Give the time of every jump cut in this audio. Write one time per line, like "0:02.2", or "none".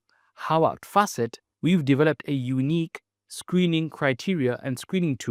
0:01.4